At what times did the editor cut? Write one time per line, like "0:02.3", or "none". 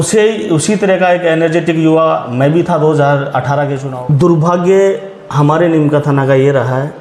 0:03.8

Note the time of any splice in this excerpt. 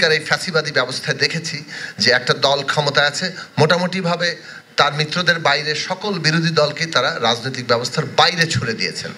none

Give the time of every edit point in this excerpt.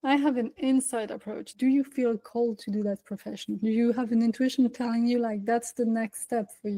0:01.5

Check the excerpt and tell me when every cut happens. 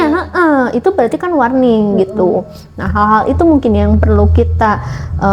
none

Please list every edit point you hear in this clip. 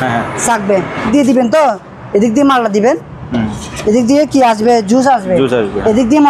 0:01.1

